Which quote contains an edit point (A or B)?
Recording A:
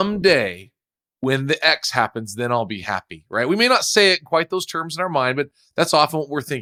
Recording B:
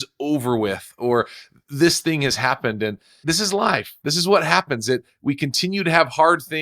B